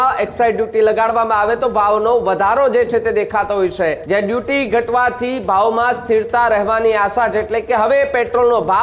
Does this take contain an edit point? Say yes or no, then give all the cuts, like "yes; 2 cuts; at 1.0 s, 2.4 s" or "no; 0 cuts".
yes; 1 cut; at 4.0 s